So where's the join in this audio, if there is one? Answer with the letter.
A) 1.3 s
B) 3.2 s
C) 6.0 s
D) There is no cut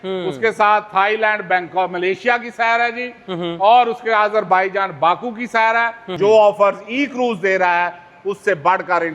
C